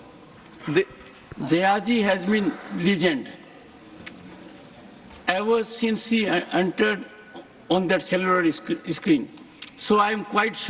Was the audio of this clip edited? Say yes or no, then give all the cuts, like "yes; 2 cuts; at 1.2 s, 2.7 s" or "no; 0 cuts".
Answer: no; 0 cuts